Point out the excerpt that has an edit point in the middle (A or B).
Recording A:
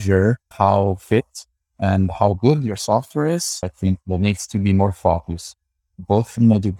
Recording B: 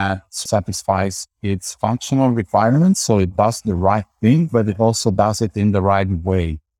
A